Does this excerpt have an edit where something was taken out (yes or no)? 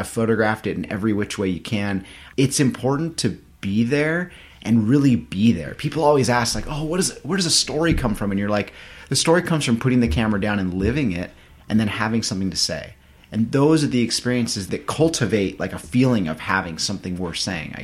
yes